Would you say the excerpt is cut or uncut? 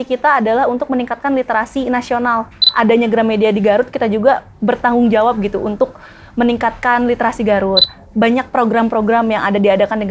cut